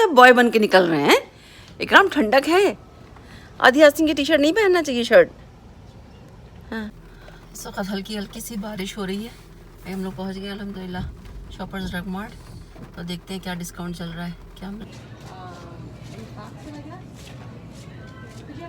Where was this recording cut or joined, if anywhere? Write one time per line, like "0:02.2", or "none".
0:07.1
0:14.8